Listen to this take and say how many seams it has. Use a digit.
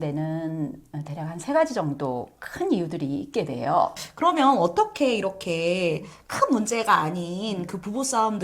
1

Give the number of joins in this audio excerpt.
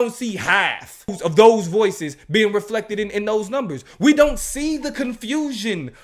1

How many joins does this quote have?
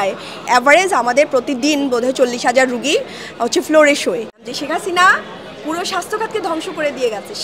1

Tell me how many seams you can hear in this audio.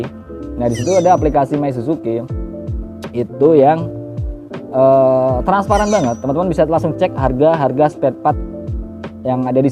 0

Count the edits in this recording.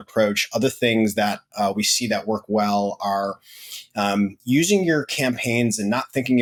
0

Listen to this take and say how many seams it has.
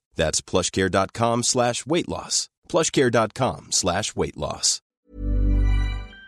1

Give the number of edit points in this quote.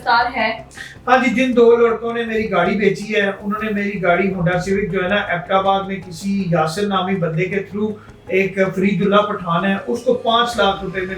0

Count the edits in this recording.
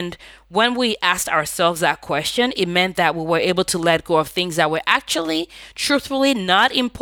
0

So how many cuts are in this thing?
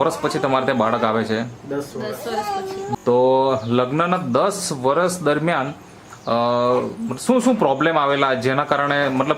1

